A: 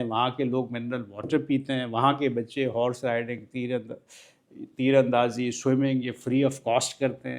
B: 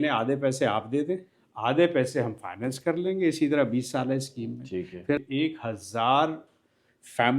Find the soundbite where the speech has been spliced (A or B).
B